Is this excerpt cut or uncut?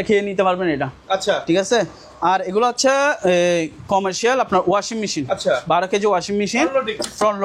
uncut